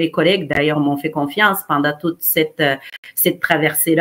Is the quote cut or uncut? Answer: uncut